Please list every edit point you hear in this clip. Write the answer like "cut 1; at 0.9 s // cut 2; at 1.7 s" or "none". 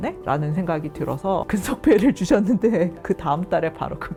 none